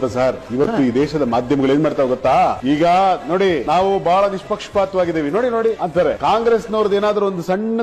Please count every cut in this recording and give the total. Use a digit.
0